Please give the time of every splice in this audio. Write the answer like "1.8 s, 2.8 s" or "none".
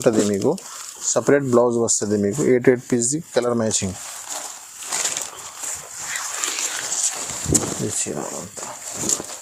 none